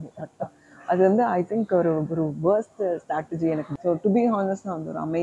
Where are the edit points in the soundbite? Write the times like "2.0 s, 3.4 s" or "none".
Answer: 3.7 s